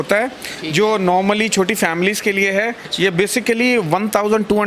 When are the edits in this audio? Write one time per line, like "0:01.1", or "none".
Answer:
0:02.8